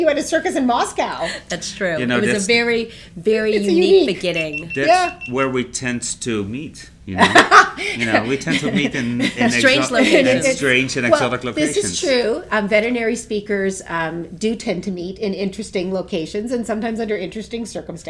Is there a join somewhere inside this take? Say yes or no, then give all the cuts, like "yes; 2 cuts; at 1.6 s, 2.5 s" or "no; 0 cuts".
no; 0 cuts